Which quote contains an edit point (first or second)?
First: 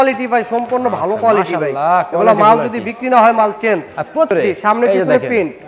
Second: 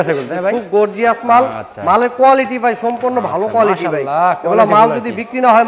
first